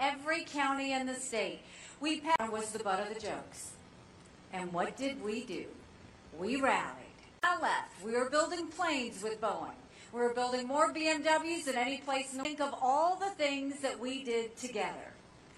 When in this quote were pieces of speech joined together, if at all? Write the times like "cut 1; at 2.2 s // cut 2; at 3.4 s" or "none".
none